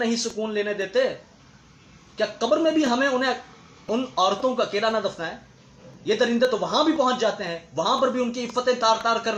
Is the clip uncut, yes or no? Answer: yes